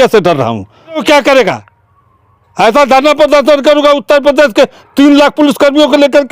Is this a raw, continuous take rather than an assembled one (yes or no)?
no